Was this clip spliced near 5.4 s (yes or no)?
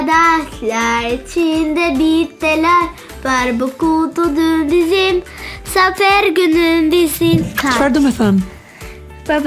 no